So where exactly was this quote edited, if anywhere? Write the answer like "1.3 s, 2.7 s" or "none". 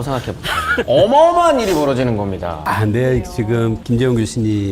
0.8 s, 2.6 s